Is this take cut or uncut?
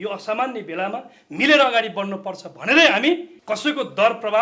cut